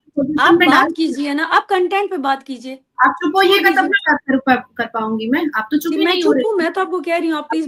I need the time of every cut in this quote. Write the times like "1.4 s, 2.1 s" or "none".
none